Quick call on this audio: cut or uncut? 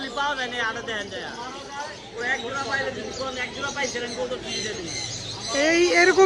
uncut